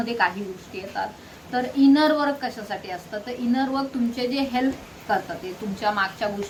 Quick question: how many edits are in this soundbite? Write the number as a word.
zero